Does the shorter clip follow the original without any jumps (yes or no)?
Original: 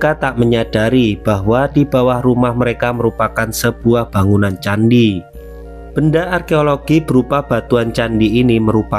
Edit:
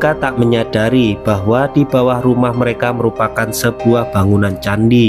yes